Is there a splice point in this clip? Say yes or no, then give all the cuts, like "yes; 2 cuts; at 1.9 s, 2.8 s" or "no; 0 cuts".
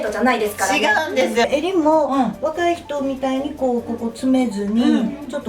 yes; 1 cut; at 1.4 s